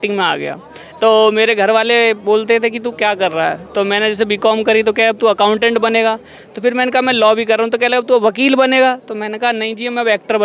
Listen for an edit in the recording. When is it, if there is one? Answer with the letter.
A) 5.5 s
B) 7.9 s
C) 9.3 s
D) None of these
D